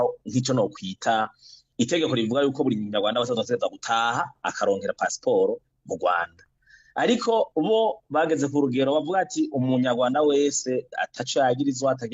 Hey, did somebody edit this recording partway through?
no; 0 cuts

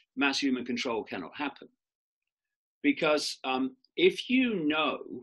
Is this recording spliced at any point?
no; 0 cuts

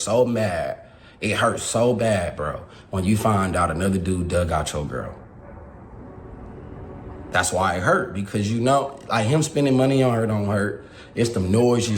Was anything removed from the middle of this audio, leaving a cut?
no; 0 cuts

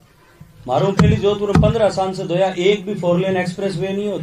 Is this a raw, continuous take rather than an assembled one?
yes; 0 cuts

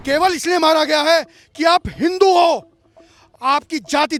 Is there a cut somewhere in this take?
no; 0 cuts

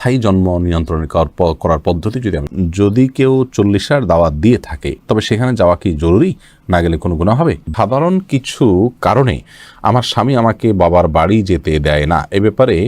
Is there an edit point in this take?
yes; 2 cuts; at 2.5 s, 7.7 s

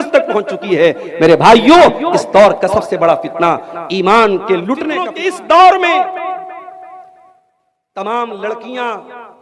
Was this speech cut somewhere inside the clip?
yes; 1 cut; at 5.0 s

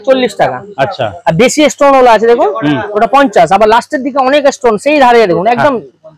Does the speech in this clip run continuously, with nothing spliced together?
yes; 0 cuts

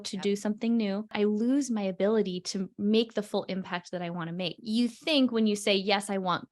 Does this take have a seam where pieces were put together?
yes; 2 cuts; at 1.1 s, 4.6 s

